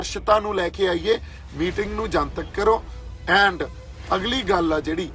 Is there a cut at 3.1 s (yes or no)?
no